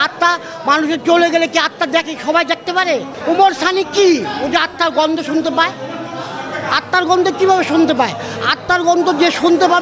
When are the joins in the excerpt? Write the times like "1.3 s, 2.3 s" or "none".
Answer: 3.1 s